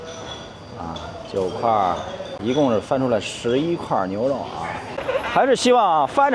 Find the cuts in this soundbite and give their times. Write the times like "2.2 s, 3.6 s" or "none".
2.3 s, 5.0 s